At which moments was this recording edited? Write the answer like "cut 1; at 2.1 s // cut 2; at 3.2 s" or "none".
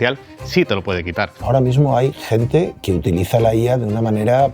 cut 1; at 1.3 s // cut 2; at 2.8 s

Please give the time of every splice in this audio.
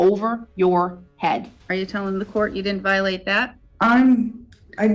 cut 1; at 1.6 s // cut 2; at 3.6 s

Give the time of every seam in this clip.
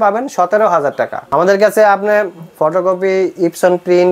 cut 1; at 1.2 s

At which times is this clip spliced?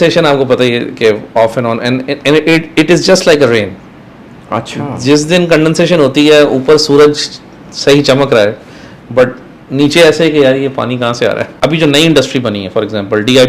cut 1; at 11.5 s

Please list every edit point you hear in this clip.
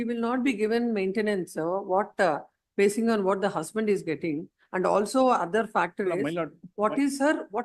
none

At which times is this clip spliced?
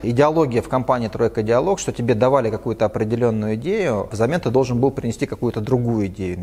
cut 1; at 4.1 s

